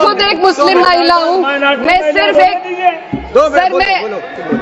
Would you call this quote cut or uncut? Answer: uncut